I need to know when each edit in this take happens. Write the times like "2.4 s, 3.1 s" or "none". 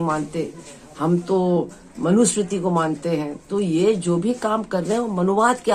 none